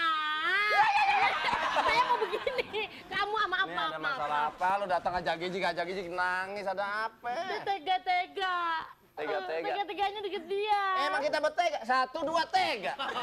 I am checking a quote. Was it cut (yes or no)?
no